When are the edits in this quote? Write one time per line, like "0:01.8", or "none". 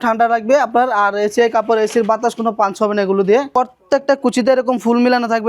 0:03.5

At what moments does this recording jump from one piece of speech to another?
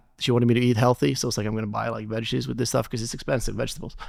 none

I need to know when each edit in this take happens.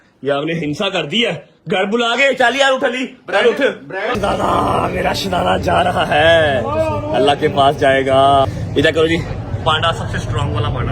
0:04.1
0:08.5

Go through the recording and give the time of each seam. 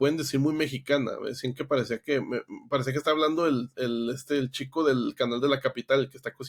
none

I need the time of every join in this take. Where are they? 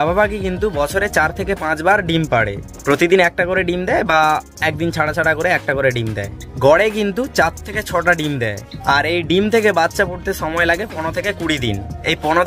none

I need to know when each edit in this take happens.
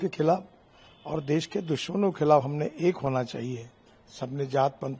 none

